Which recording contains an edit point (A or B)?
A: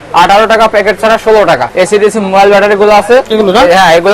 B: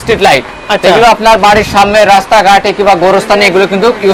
A